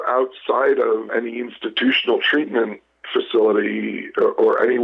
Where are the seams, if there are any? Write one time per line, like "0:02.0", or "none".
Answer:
0:01.1

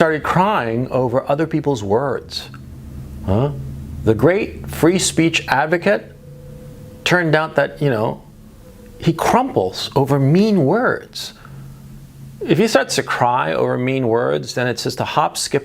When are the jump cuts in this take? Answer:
none

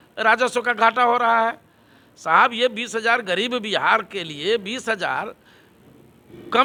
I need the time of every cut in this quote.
none

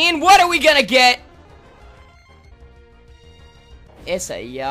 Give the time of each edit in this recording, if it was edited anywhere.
0:02.5
0:03.9

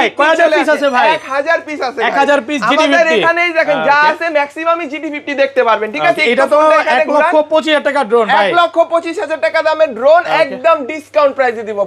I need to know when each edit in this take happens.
none

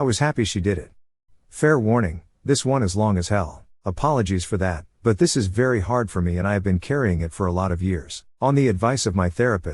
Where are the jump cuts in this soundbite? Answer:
0:01.1

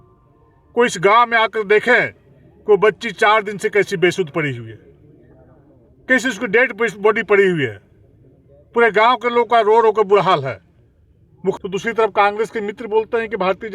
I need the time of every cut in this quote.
0:11.6

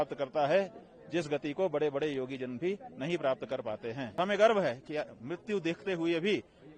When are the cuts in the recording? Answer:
0:04.2

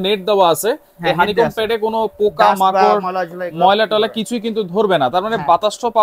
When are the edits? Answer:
none

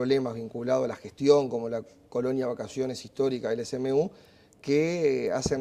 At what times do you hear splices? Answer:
0:02.4

